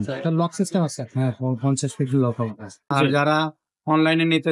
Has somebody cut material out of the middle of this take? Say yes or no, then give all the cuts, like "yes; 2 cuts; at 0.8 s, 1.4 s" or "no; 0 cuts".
yes; 1 cut; at 2.8 s